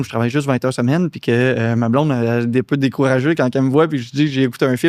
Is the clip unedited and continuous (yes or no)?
yes